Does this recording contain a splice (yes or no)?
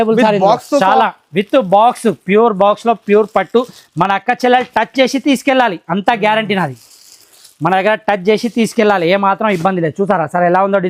no